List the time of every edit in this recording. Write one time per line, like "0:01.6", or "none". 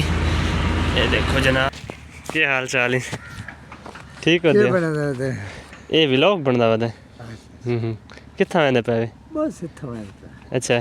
0:01.7